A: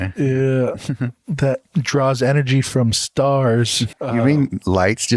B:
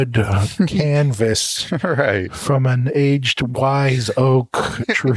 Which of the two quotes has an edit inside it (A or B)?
A